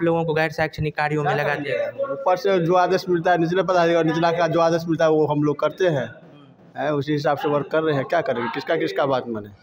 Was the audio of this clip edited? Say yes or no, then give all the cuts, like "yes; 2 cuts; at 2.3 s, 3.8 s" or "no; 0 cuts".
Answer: no; 0 cuts